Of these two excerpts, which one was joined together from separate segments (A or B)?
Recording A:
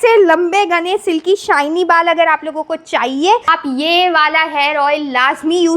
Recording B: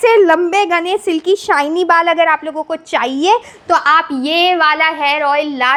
A